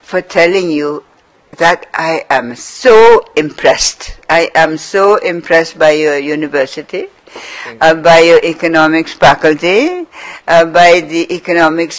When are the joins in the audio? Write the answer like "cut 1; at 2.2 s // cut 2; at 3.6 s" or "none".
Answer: cut 1; at 6.4 s